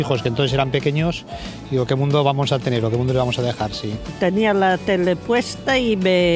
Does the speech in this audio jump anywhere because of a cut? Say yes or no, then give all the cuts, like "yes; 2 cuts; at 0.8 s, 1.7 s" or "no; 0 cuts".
yes; 1 cut; at 4.1 s